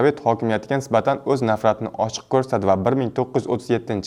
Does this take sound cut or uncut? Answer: uncut